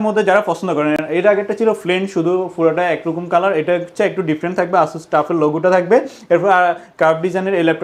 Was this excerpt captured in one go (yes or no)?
yes